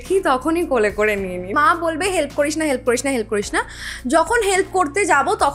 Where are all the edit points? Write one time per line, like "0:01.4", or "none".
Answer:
0:01.5